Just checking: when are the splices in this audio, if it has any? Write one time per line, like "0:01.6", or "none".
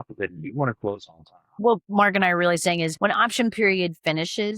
0:01.5
0:02.9